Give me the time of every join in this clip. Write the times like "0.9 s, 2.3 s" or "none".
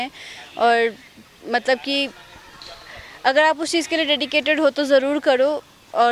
none